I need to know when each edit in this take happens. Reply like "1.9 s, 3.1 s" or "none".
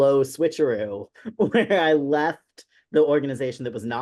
none